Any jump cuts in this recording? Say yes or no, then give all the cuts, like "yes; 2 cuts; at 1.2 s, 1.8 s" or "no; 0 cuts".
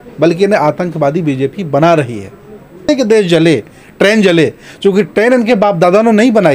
yes; 1 cut; at 2.9 s